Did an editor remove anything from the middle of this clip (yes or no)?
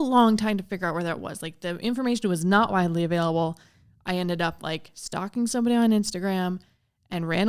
no